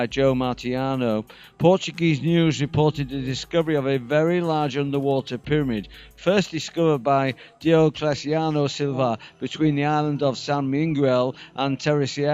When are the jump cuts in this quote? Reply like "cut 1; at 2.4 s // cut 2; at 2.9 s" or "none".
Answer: cut 1; at 9.4 s